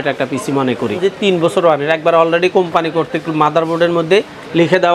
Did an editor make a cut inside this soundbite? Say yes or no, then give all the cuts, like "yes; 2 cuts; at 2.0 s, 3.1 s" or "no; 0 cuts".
yes; 1 cut; at 1.0 s